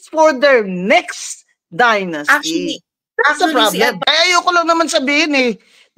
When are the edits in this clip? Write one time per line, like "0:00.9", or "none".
0:04.0